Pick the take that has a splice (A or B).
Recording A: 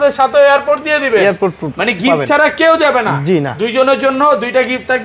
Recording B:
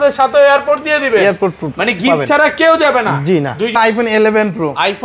B